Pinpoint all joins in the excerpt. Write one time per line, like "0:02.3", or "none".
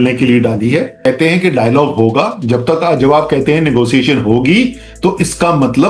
0:00.9